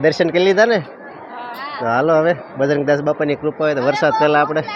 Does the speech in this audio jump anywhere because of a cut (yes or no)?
no